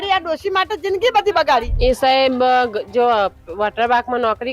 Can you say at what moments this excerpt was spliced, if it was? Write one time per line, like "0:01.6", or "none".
0:01.7